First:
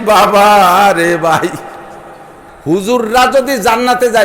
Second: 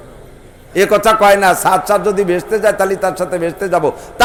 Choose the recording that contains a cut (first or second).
first